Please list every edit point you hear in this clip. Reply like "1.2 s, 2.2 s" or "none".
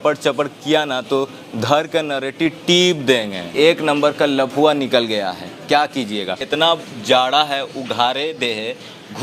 3.5 s, 6.4 s